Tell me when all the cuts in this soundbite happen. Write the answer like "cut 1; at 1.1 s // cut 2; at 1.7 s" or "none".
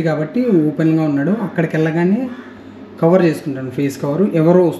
none